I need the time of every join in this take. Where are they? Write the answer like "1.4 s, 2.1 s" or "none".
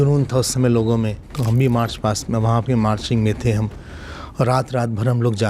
1.3 s

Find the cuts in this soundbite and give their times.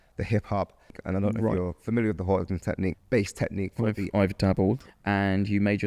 1.0 s, 3.0 s, 4.8 s

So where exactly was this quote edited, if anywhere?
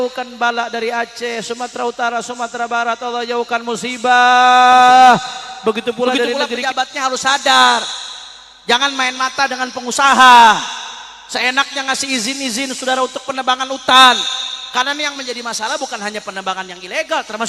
6.5 s

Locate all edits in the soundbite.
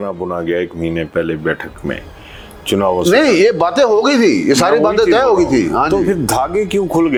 none

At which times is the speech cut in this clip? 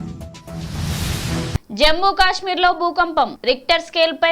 1.6 s

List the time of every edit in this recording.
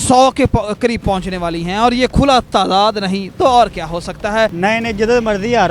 4.5 s

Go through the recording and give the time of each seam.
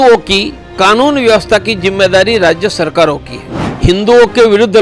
3.8 s

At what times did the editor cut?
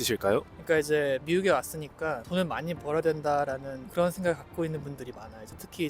1.2 s, 3.8 s

